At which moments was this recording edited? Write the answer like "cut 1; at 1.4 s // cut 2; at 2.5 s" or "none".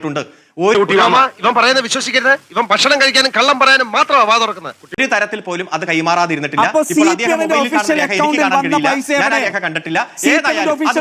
none